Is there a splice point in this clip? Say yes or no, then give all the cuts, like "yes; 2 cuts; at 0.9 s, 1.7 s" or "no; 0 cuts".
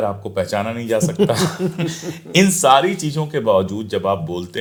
no; 0 cuts